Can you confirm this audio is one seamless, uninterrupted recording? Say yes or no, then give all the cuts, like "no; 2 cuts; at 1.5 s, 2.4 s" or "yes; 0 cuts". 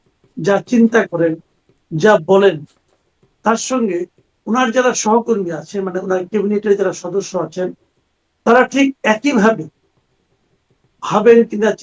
yes; 0 cuts